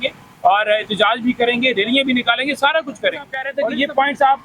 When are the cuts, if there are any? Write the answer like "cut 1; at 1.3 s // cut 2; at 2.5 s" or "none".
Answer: cut 1; at 3.5 s